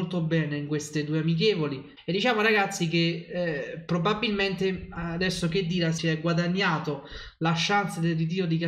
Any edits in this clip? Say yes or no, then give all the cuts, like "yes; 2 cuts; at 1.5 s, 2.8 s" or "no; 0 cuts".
yes; 1 cut; at 1.9 s